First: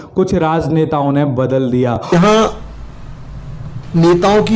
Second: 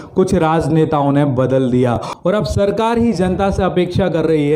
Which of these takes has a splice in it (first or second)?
first